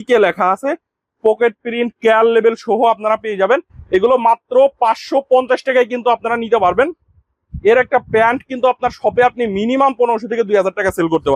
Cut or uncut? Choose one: uncut